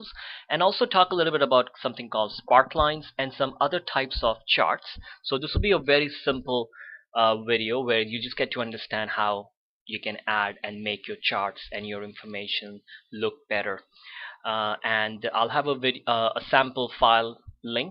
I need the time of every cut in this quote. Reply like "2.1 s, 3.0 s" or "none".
10.5 s